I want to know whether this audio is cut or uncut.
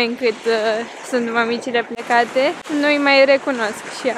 uncut